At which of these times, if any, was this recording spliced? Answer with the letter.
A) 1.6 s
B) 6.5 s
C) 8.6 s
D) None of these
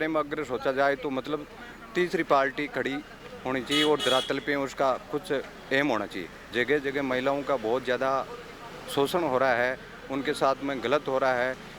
B